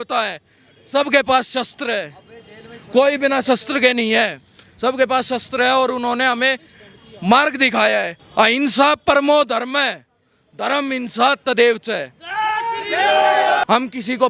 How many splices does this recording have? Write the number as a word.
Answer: two